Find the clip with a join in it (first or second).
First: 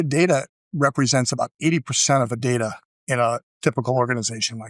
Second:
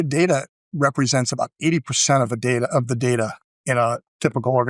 first